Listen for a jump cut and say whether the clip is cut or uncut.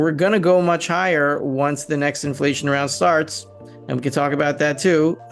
uncut